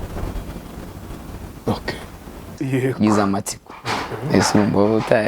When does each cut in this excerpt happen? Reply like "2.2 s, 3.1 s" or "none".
2.6 s